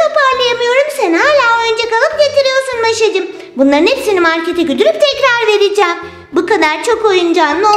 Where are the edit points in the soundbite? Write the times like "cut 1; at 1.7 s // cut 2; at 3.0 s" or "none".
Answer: none